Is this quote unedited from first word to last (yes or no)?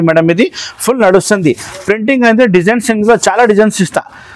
yes